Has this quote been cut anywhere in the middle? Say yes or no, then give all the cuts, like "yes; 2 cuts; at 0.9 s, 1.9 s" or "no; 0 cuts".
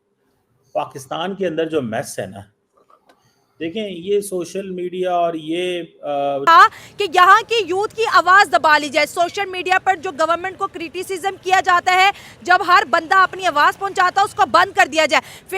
yes; 1 cut; at 6.4 s